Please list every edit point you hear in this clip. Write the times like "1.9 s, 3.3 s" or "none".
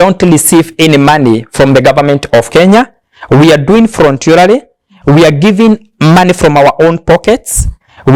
none